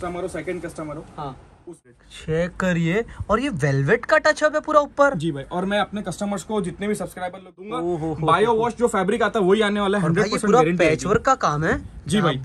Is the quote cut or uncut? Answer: cut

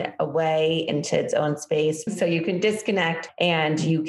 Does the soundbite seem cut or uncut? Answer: cut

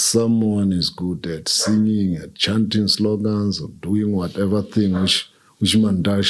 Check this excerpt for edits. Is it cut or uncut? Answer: uncut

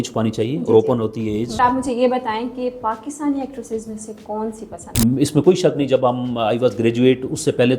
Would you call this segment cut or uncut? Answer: cut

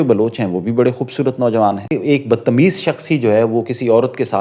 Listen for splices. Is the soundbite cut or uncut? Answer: cut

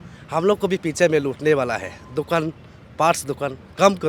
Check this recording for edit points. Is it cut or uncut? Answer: uncut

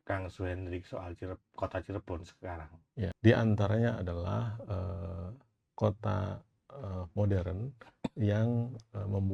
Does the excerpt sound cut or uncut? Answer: cut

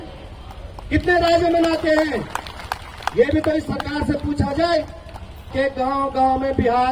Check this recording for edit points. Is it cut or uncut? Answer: cut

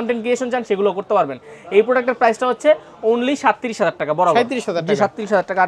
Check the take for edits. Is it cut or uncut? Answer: uncut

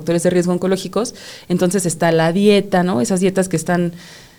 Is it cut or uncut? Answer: uncut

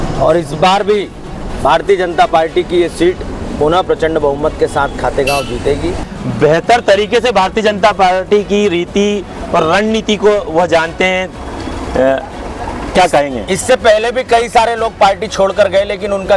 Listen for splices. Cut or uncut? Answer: cut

